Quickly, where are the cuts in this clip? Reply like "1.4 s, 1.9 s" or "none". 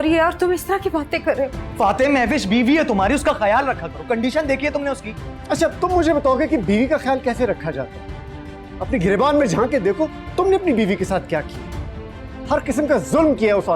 1.6 s